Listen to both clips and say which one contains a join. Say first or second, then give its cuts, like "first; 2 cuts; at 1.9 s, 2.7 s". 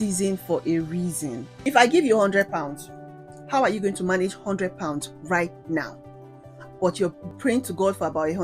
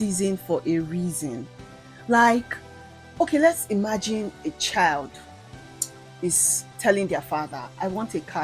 first; 2 cuts; at 1.5 s, 7.3 s